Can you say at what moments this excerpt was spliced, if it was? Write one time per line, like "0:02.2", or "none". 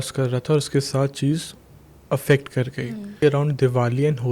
0:03.2

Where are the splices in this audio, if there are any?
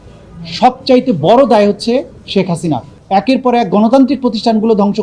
0:02.9

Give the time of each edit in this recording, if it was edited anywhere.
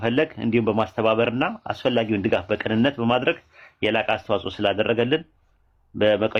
none

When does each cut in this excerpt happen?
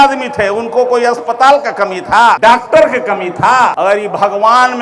0:02.4
0:03.7

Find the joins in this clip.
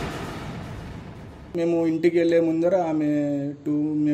0:01.5

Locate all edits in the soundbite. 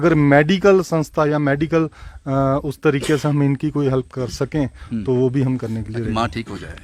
none

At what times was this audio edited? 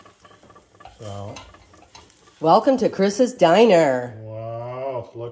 none

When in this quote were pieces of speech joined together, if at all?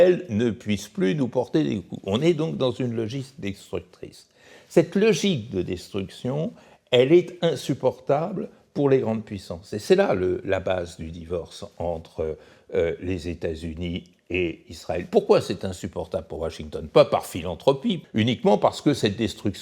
0:18.0

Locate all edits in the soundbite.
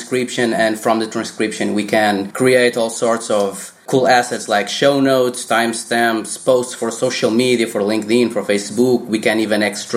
0:02.3
0:03.7

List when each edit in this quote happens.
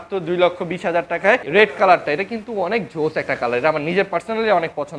0:01.4

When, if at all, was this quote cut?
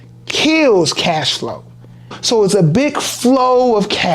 0:02.2

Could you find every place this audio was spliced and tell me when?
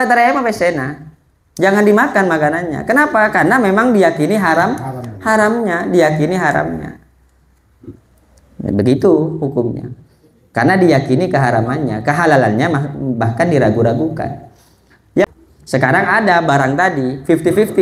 0:15.2

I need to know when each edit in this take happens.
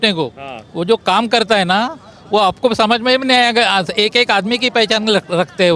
none

